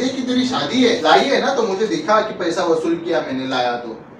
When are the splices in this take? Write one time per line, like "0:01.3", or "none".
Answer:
0:01.0